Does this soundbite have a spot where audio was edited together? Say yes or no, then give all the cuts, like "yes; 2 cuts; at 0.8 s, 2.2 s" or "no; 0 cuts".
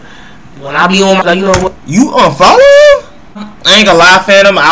yes; 2 cuts; at 1.2 s, 3.5 s